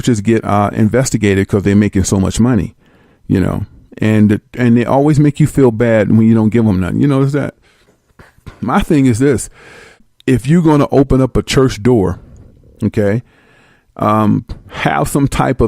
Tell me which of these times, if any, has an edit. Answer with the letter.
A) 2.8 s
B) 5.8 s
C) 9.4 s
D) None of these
B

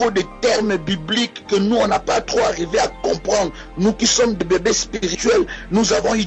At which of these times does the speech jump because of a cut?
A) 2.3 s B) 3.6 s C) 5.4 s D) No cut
A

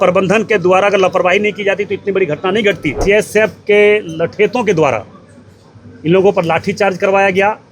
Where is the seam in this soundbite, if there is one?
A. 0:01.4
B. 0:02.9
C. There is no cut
B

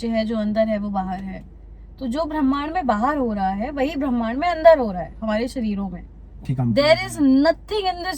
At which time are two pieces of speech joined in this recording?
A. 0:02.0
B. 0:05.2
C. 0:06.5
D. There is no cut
C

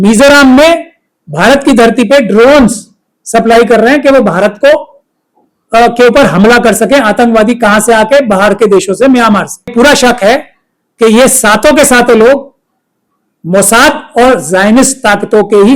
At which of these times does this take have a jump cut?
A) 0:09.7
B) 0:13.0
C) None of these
A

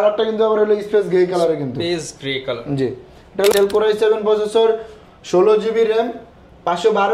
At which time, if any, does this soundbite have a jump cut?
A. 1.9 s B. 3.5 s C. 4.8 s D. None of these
B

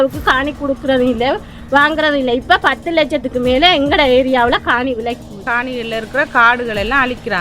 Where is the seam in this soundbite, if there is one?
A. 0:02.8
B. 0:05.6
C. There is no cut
B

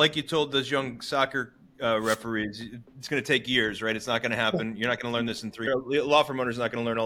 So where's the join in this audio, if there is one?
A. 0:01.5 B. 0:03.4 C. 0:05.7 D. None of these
C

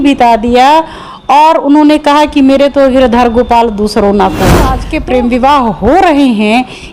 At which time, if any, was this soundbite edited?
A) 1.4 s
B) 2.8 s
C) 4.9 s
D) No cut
C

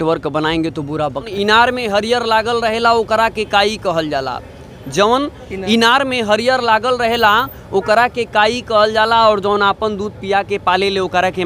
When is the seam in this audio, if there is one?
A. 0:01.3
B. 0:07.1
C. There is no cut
A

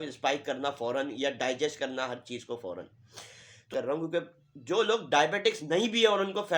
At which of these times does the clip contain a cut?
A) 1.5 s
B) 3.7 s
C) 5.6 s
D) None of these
B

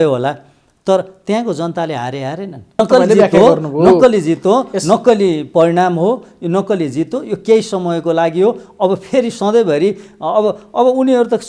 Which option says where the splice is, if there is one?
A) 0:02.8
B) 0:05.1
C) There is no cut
A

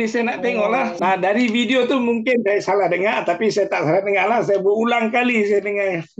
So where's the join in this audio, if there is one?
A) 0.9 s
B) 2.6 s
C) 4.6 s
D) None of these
A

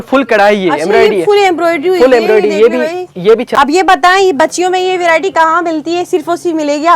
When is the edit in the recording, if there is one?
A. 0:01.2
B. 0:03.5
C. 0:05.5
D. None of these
B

